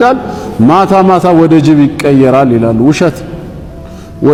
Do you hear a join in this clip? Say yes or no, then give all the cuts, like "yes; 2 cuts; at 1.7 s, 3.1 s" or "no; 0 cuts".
no; 0 cuts